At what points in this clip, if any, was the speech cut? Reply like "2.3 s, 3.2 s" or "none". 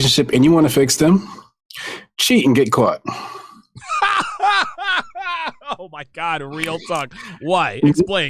none